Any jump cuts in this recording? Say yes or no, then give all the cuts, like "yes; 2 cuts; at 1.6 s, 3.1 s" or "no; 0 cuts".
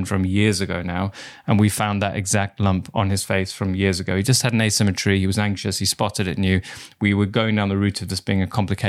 no; 0 cuts